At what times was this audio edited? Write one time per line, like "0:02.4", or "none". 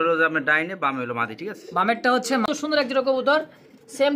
0:02.4